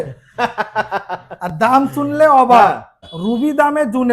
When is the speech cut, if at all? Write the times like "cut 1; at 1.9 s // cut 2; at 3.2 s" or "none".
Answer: cut 1; at 3.1 s